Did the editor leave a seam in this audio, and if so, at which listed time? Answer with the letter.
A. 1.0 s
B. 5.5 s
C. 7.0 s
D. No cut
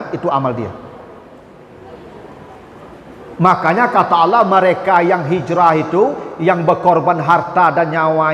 D